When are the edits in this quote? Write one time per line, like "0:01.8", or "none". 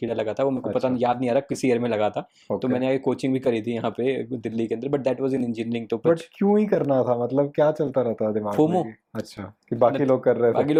none